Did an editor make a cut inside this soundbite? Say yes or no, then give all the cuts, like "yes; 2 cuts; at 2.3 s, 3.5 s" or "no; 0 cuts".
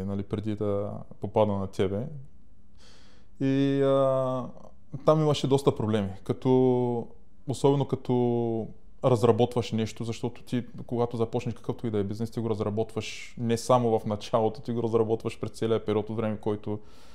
no; 0 cuts